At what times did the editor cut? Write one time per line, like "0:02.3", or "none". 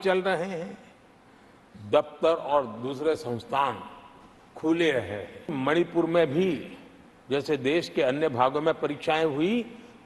0:05.6